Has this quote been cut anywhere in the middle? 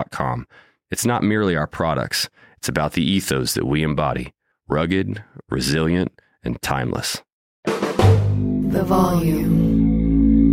yes; 1 cut; at 7.5 s

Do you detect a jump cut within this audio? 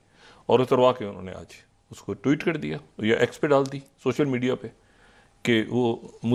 no; 0 cuts

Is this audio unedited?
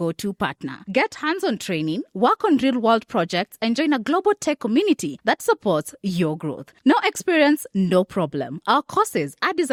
yes; 0 cuts

